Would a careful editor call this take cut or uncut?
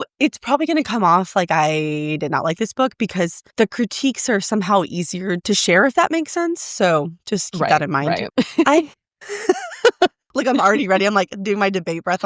cut